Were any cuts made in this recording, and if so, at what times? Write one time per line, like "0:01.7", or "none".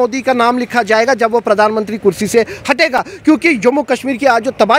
none